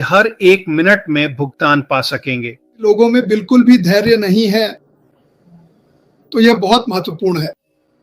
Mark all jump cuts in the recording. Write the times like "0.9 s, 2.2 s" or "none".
2.8 s

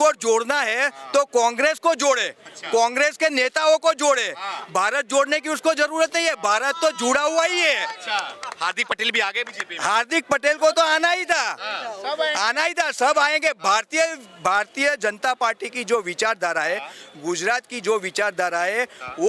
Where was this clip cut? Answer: none

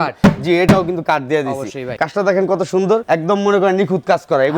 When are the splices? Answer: 2.0 s, 3.0 s

